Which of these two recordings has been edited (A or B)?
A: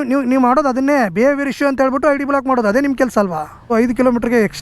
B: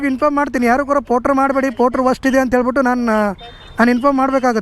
A